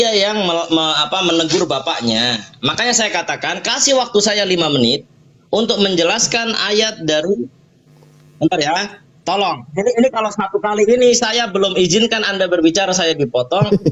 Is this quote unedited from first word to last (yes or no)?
yes